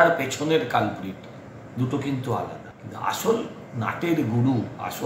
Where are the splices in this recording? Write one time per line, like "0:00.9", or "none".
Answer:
0:02.7